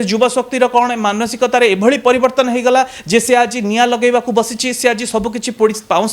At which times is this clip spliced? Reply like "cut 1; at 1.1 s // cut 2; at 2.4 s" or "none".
none